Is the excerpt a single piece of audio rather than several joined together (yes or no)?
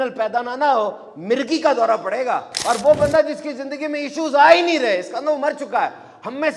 no